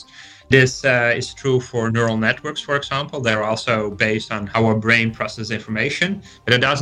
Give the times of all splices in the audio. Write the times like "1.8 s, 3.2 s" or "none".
4.4 s